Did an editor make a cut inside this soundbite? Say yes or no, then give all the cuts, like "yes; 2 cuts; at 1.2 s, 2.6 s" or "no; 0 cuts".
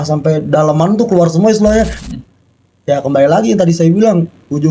yes; 1 cut; at 2.0 s